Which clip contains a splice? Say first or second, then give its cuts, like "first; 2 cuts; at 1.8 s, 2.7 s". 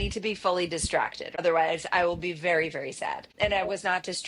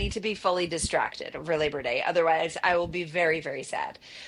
first; 2 cuts; at 1.4 s, 3.2 s